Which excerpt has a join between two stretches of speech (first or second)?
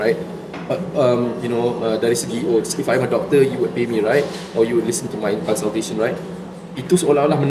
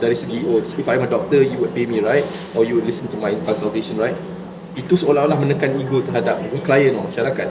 second